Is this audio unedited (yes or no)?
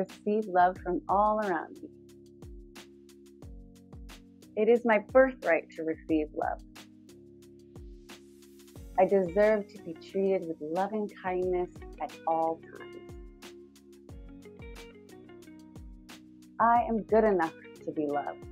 no